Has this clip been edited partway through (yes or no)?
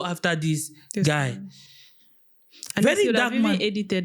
no